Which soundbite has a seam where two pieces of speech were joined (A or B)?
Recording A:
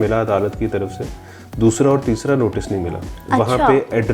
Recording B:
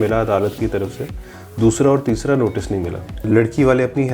B